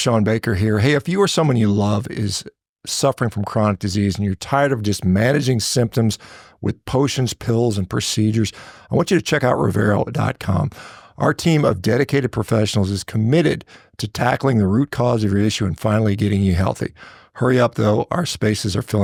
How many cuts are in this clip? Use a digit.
0